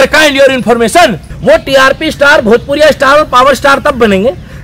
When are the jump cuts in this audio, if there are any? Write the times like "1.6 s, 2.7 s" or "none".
1.3 s

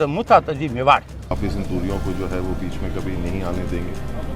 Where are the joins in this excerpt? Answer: 1.3 s

